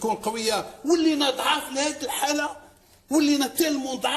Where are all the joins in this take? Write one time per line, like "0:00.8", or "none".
none